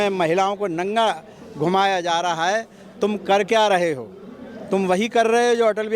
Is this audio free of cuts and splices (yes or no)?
yes